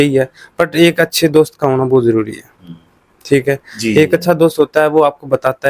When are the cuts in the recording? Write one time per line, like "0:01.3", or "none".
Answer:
none

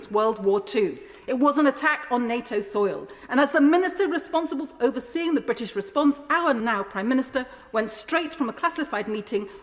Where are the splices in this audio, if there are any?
0:06.6

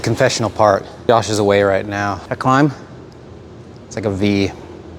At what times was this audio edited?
0:00.9
0:02.3

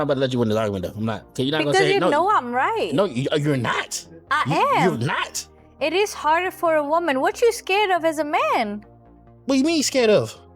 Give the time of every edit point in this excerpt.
0:01.2

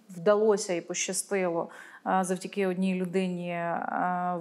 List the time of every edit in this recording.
none

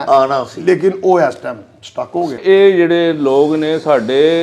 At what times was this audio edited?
0:02.4

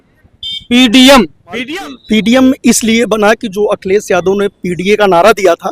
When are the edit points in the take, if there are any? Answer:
0:01.6

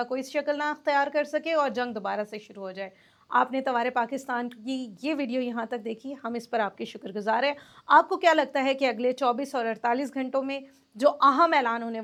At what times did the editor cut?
none

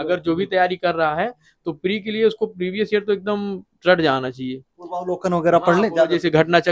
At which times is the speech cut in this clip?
none

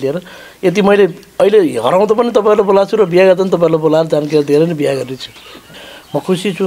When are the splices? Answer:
0:05.8

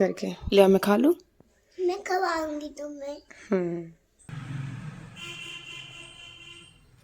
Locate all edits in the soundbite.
0:04.1

